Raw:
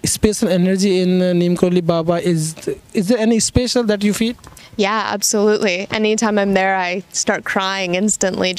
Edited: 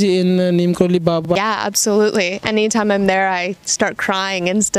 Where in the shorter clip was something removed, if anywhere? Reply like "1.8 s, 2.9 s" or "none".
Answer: 1.2 s